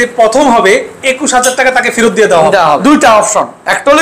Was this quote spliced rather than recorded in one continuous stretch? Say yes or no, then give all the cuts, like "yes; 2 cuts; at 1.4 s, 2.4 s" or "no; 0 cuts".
yes; 1 cut; at 2.8 s